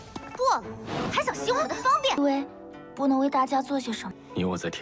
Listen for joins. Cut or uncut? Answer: cut